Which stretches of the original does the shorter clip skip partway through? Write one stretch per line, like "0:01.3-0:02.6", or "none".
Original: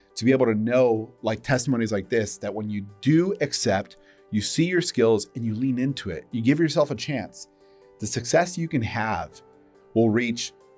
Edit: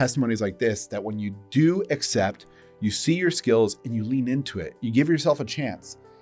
none